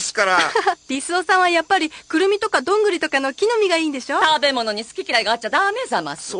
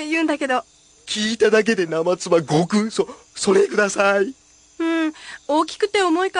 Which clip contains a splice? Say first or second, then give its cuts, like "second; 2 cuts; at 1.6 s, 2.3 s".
first; 1 cut; at 3.8 s